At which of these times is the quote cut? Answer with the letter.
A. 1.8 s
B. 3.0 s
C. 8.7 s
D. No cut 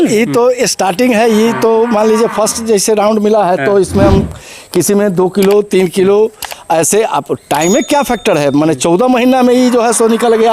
D